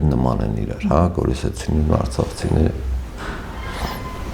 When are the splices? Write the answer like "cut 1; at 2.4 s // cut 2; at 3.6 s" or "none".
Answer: none